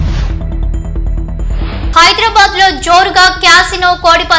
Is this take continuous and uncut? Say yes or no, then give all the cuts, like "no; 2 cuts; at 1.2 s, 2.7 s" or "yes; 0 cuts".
no; 1 cut; at 1.9 s